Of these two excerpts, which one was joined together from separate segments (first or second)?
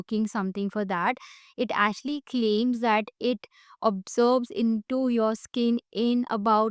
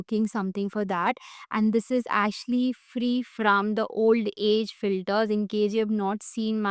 first